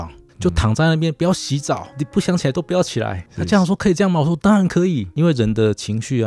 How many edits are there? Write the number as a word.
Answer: one